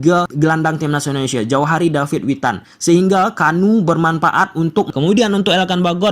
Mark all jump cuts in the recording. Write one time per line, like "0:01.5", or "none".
0:04.9